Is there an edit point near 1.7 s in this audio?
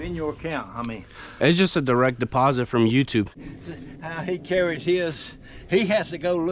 no; 1 cut; at 3.3 s

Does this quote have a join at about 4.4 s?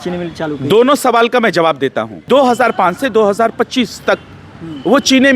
no; 1 cut; at 2.3 s

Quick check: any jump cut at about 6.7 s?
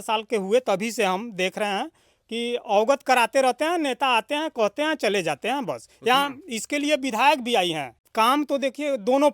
no; 1 cut; at 8.0 s

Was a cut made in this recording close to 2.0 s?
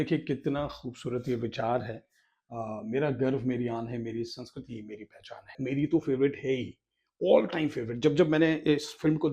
no; 1 cut; at 5.5 s

